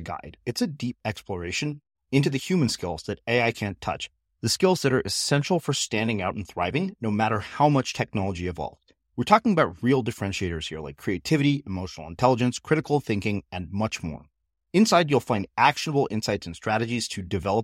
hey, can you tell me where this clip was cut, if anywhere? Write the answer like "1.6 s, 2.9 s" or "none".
none